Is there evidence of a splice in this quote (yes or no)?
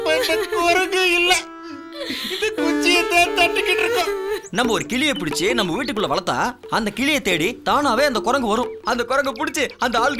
yes